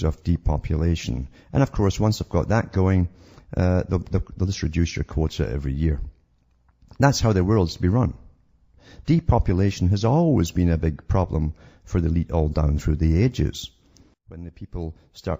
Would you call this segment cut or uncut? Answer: uncut